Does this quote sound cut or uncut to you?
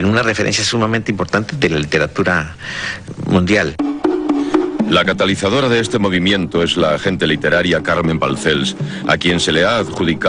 cut